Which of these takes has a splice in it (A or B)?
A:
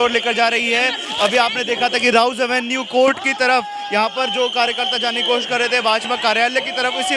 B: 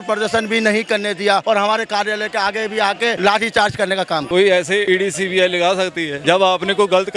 B